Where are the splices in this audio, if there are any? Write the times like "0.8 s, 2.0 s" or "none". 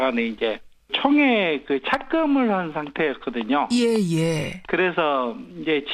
none

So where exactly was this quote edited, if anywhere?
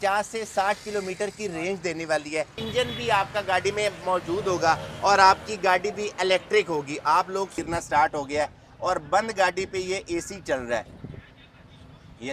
2.6 s, 7.5 s

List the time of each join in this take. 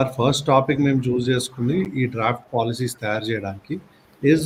none

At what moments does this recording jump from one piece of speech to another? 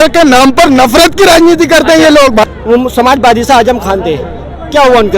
2.4 s

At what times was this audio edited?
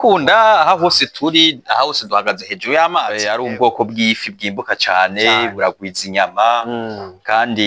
3.2 s

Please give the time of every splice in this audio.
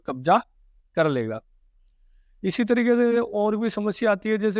none

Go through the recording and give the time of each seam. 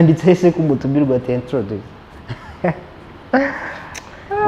none

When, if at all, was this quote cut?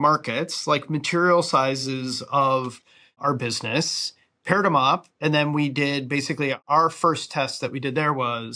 6.6 s

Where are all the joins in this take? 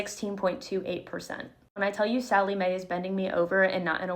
1.8 s

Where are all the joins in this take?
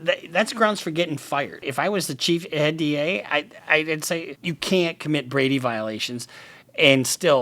1.7 s, 4.3 s

